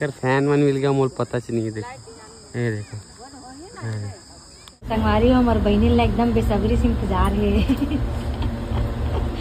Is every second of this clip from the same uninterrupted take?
no; 1 cut; at 5.0 s

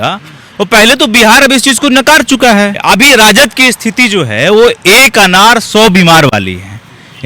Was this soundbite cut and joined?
yes; 1 cut; at 2.8 s

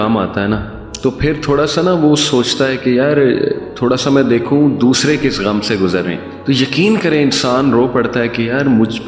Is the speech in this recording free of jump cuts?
yes; 0 cuts

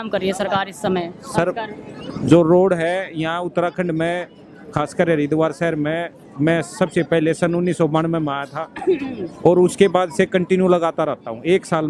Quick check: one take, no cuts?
yes; 0 cuts

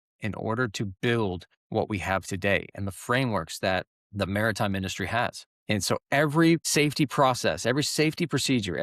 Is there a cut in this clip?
yes; 4 cuts; at 1.5 s, 4.0 s, 5.5 s, 6.7 s

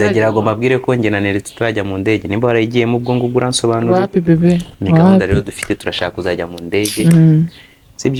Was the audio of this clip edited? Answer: no; 0 cuts

